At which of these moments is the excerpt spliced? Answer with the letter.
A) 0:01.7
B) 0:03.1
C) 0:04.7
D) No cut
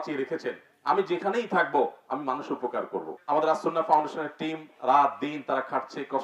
B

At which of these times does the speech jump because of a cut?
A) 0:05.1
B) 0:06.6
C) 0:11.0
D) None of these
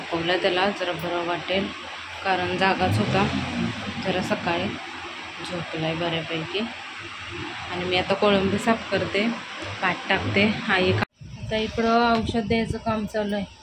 C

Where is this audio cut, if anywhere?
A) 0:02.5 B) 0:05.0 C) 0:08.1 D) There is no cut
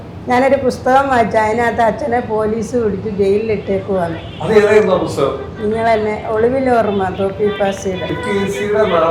C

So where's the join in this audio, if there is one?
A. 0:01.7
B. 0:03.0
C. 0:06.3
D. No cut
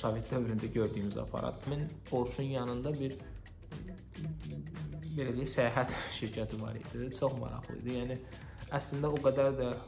A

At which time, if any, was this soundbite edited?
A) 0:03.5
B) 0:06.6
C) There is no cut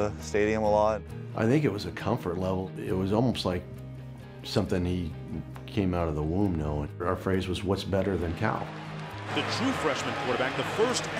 B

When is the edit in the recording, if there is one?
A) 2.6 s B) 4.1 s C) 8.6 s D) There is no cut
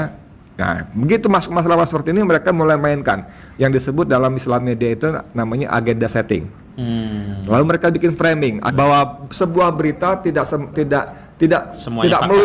C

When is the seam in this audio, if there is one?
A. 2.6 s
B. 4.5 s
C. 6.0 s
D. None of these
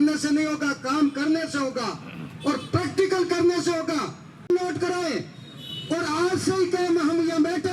B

